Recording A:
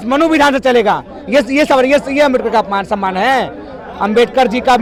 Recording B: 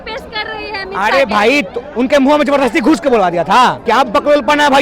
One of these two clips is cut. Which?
B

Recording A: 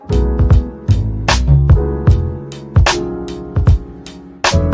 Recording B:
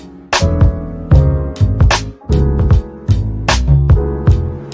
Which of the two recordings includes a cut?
B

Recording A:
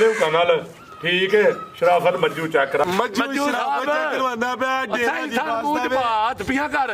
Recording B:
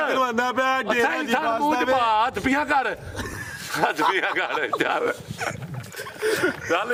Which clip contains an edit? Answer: A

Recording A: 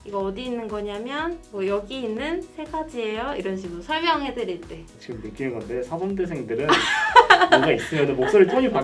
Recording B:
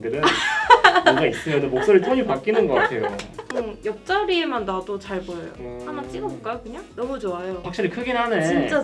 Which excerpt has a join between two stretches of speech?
B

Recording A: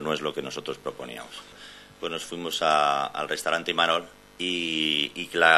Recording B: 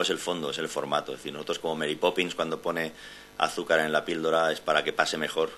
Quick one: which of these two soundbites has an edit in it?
A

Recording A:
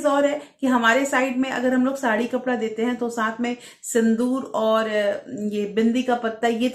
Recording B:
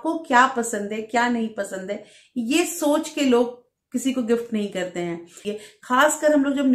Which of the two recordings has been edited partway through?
B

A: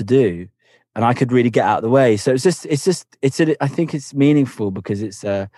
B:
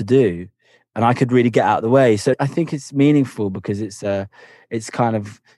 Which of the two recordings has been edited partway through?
B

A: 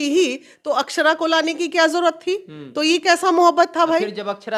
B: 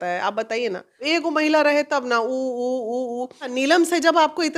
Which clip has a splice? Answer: B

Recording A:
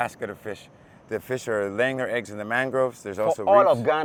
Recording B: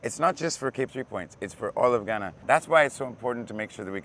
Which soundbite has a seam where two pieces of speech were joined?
B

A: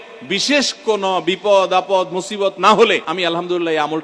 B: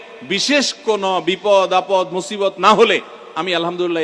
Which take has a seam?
A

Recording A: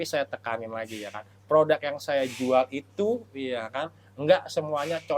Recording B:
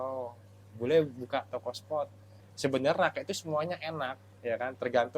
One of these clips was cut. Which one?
B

